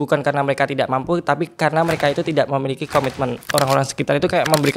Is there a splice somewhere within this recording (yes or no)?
yes